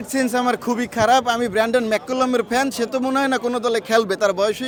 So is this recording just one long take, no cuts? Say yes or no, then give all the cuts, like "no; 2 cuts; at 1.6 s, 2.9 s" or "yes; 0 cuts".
yes; 0 cuts